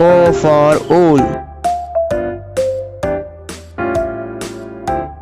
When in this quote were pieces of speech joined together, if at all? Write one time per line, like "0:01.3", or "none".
none

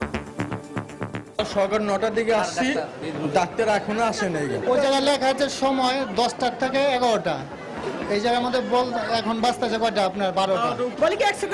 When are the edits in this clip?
0:01.3

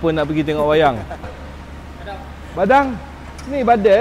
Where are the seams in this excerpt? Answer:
0:01.2

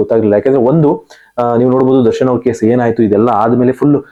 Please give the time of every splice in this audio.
none

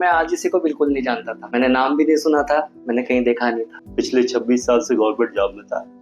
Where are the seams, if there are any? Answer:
0:01.3
0:03.8

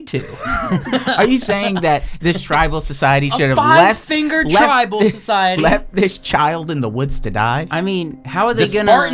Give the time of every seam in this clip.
none

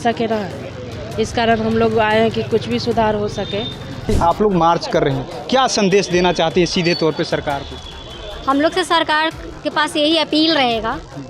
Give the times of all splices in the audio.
0:04.1

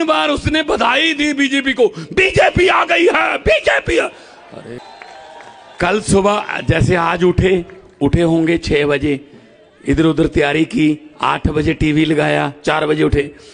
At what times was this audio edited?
0:04.8

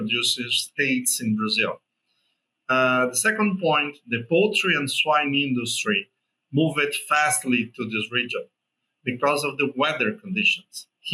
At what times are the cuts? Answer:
none

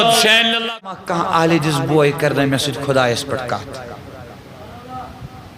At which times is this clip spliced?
0:00.9

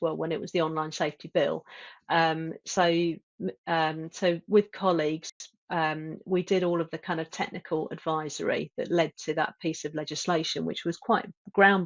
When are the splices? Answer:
none

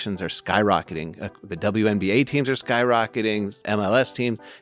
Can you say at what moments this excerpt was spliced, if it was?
0:03.6

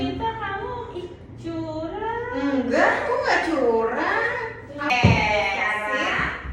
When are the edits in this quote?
0:04.9

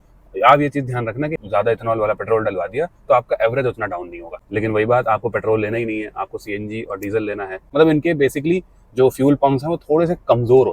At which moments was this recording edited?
0:01.4
0:04.4
0:07.6

